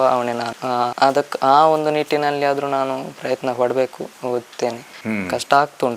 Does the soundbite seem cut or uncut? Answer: cut